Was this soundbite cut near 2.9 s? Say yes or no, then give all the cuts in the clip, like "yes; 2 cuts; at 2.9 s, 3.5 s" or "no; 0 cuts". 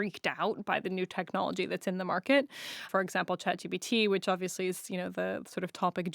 yes; 1 cut; at 2.9 s